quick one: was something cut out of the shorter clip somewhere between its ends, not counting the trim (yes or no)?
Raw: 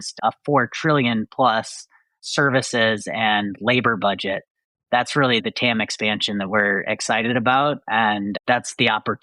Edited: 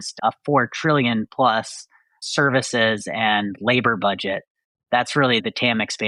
no